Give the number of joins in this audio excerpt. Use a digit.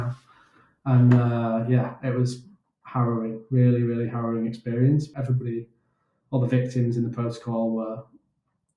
1